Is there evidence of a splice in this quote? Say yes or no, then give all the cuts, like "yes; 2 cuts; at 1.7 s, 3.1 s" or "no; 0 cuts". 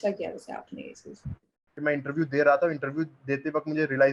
yes; 1 cut; at 1.6 s